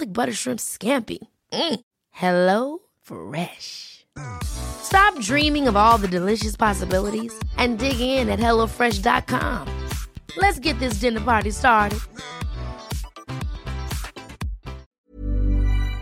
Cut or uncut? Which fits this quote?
cut